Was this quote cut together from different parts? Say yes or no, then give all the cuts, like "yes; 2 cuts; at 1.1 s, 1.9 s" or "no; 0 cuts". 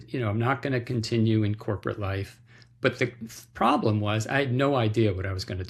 no; 0 cuts